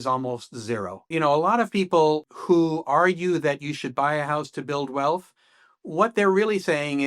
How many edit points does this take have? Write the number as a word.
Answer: one